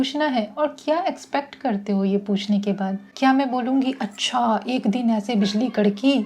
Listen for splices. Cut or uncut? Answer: cut